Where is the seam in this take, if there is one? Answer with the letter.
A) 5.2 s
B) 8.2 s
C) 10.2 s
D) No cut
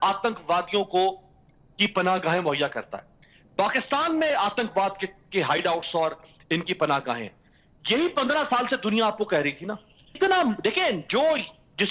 C